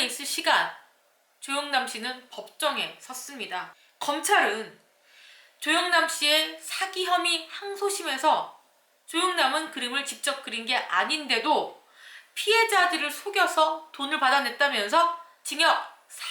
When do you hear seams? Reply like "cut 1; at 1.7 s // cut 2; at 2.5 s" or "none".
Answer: cut 1; at 3.8 s